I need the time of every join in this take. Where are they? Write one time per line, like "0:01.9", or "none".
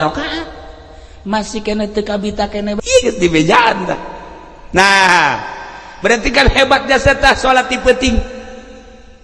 0:02.8